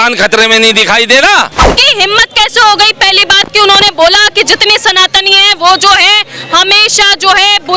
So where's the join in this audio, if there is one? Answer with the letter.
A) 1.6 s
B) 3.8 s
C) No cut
A